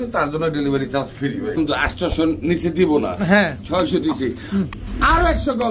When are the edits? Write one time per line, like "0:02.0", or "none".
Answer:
0:01.6